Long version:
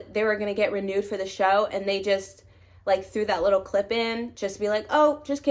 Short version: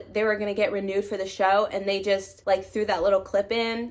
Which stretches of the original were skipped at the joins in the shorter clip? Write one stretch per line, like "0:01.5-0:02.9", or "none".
0:02.3-0:02.7